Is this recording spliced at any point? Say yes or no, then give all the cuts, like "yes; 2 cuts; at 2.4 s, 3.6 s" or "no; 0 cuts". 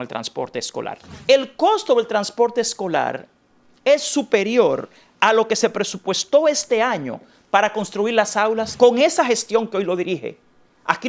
yes; 2 cuts; at 1.0 s, 8.7 s